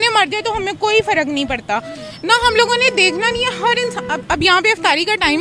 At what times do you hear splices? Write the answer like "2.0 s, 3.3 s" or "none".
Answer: none